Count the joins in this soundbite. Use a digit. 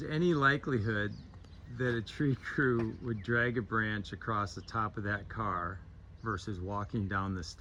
0